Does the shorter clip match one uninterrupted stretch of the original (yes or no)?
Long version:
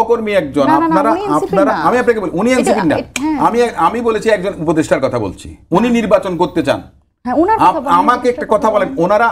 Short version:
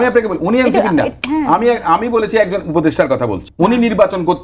no